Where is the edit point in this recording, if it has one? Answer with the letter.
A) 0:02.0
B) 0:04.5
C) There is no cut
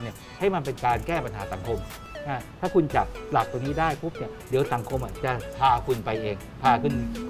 A